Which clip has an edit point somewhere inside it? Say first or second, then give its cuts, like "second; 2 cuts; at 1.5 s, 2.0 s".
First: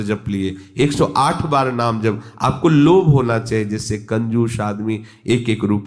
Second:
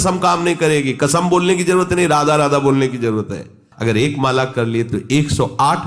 second; 1 cut; at 3.6 s